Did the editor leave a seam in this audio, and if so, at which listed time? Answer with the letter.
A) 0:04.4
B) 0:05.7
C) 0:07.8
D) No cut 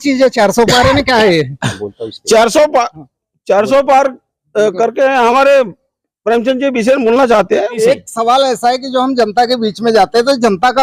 C